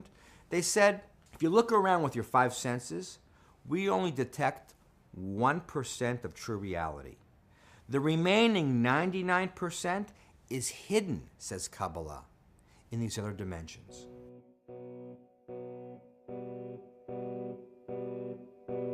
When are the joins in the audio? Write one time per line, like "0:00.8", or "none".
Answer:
0:13.1